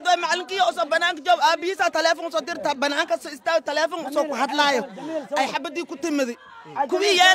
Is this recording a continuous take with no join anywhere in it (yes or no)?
yes